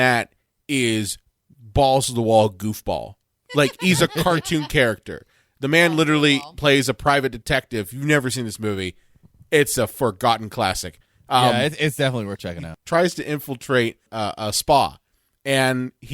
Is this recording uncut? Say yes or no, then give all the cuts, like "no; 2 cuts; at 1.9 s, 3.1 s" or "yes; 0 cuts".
no; 2 cuts; at 12.7 s, 14.1 s